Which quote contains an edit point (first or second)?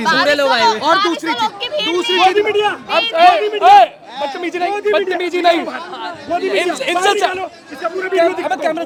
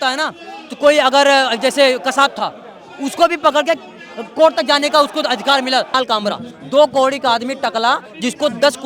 second